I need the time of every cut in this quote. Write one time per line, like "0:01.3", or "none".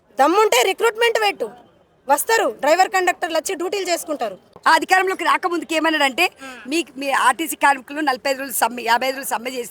0:04.5